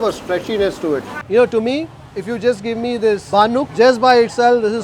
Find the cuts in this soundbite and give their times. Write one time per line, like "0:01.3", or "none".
0:01.1